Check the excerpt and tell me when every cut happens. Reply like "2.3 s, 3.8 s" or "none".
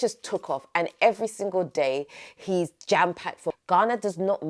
3.5 s